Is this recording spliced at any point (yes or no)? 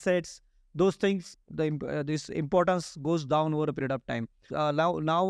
yes